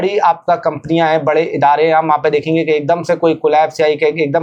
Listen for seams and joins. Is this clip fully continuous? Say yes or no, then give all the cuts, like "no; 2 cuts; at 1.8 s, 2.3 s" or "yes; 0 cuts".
yes; 0 cuts